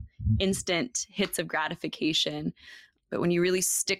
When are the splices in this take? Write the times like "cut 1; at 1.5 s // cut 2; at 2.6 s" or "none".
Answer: cut 1; at 2.9 s